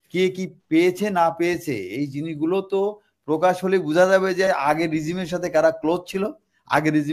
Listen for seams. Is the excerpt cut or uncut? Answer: uncut